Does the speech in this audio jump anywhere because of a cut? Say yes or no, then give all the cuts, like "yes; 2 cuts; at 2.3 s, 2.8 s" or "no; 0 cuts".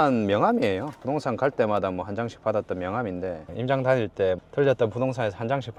no; 0 cuts